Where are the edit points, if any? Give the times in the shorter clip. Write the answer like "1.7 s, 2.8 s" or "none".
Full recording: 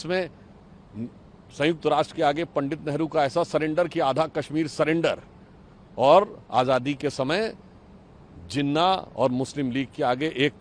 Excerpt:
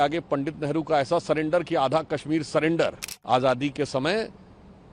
3.1 s